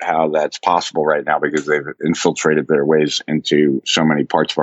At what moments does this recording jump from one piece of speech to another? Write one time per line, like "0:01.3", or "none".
none